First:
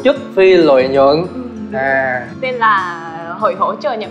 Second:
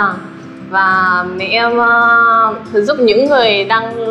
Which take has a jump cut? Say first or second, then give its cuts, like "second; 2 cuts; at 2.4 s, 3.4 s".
first; 1 cut; at 2.2 s